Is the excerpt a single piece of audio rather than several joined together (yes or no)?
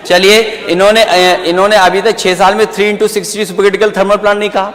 yes